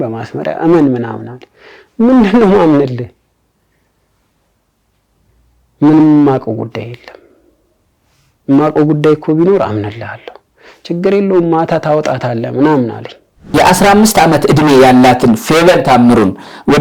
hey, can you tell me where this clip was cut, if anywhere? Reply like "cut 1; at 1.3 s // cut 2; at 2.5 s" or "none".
cut 1; at 13.4 s